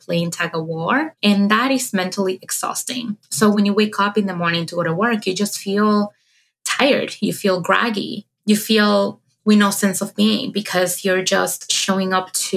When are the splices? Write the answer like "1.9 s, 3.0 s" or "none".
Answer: 1.1 s